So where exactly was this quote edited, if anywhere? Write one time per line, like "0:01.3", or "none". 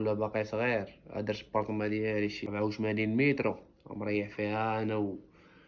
0:02.4